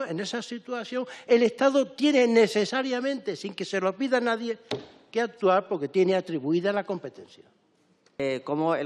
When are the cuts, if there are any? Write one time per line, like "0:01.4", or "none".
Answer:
none